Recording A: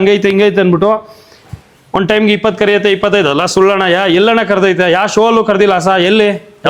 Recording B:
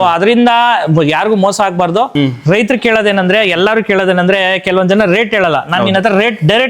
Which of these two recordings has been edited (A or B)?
B